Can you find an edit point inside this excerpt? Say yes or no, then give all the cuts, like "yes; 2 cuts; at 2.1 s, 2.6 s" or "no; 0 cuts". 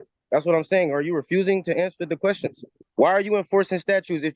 yes; 1 cut; at 2.8 s